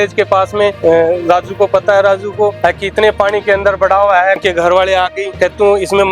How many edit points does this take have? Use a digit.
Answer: 4